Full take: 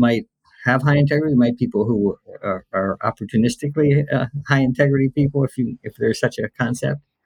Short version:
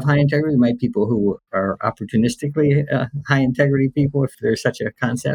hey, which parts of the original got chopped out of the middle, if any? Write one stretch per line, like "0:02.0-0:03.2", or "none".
0:02.2-0:02.7
0:05.5-0:05.9